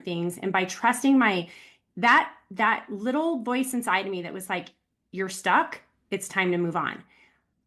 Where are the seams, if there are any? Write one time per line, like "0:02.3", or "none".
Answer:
none

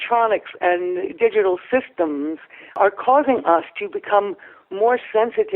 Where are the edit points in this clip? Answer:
0:02.8

